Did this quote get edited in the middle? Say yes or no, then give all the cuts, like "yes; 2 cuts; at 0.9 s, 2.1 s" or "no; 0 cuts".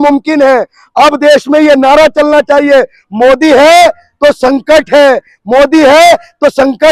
no; 0 cuts